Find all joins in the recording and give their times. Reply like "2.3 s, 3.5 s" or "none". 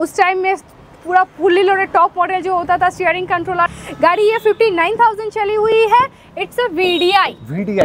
3.7 s